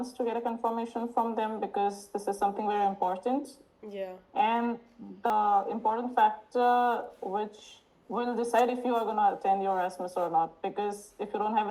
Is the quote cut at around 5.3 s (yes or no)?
yes